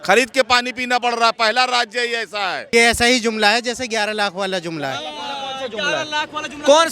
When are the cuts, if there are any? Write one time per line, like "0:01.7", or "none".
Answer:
0:02.6